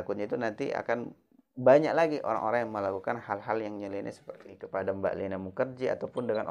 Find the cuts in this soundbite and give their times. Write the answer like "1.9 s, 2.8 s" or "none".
4.6 s